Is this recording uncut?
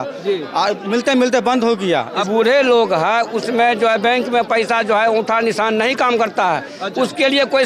no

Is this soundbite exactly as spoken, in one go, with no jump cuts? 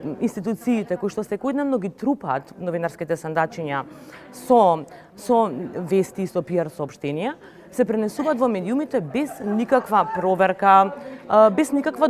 yes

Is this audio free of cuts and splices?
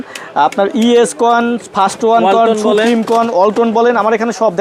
yes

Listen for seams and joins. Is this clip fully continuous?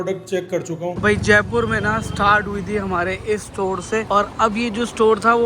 no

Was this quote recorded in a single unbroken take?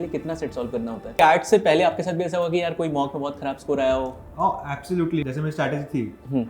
no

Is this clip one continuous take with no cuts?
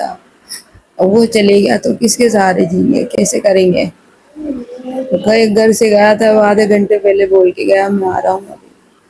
yes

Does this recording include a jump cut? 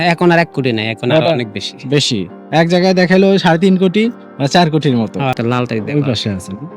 yes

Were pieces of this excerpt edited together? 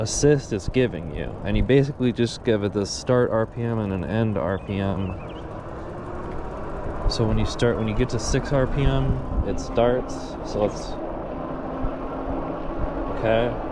no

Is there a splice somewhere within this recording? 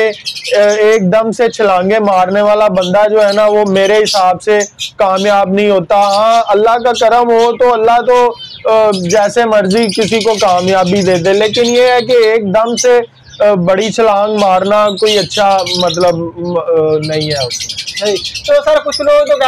no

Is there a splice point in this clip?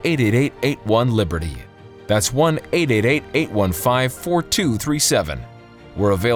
no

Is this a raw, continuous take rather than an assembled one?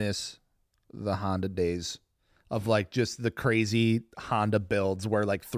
yes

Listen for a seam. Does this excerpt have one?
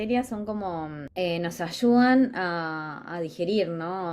yes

